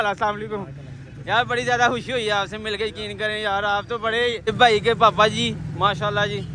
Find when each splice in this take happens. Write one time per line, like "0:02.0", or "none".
0:04.4